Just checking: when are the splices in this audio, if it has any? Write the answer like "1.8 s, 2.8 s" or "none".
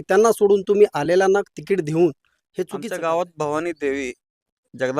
2.8 s